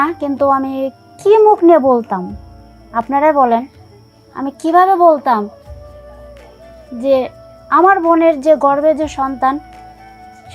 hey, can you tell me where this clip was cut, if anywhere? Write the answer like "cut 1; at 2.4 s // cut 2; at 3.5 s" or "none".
cut 1; at 5.7 s // cut 2; at 6.9 s